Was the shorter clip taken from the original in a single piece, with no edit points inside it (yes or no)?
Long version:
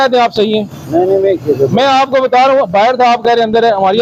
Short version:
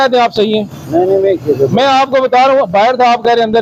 yes